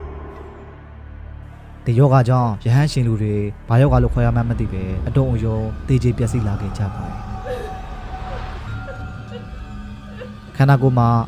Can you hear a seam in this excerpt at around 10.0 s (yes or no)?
no